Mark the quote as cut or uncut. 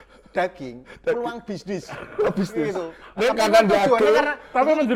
uncut